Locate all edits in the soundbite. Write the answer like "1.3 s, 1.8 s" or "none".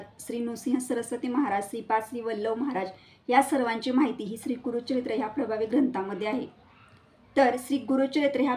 none